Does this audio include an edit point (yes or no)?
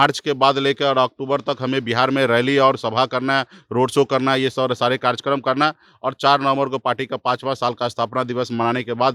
no